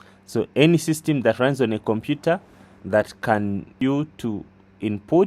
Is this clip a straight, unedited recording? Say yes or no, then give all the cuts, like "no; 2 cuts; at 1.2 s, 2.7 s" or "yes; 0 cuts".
no; 1 cut; at 3.7 s